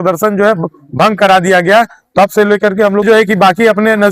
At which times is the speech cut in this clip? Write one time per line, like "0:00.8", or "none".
0:03.0